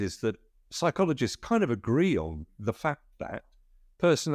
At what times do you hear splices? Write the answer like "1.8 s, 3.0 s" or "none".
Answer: none

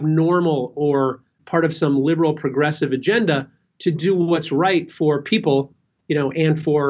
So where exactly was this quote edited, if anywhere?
1.4 s

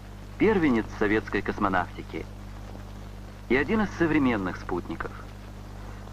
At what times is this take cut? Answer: none

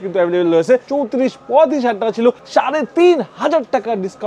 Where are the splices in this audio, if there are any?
0.9 s, 2.4 s

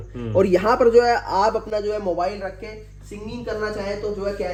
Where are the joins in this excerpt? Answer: none

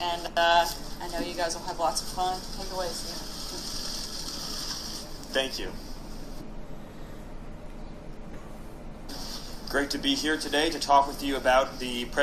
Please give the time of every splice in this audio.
none

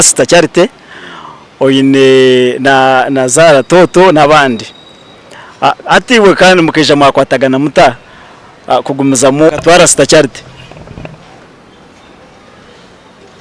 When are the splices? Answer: 9.5 s

